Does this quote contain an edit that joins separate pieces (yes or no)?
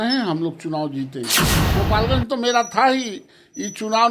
yes